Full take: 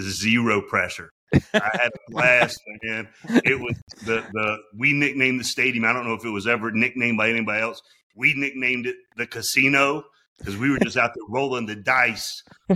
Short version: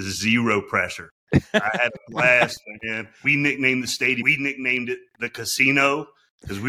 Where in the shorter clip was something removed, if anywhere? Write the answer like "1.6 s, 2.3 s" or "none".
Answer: 3.1 s, 4.2 s